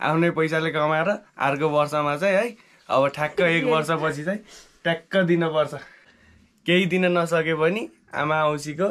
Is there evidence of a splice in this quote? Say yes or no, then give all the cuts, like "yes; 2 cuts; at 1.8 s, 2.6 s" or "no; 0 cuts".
yes; 1 cut; at 6.1 s